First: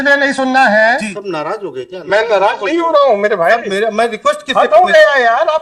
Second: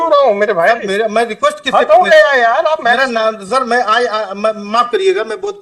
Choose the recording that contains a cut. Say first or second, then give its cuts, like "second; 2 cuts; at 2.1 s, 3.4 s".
first; 1 cut; at 1.1 s